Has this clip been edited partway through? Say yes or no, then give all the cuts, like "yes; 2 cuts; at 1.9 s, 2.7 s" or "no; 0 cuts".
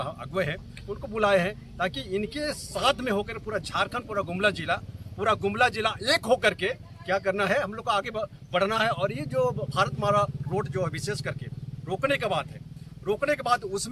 no; 0 cuts